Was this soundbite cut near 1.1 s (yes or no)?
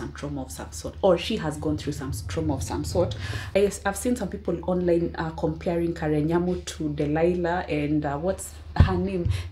no